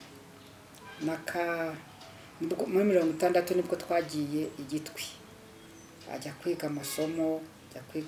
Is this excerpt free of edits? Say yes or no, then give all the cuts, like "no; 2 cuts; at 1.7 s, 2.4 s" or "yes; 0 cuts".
yes; 0 cuts